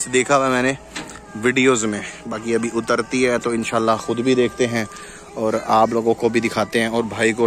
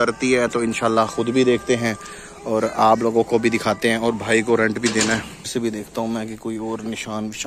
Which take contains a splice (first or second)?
second